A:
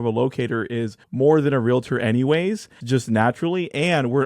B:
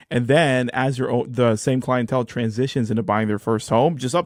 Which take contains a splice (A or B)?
A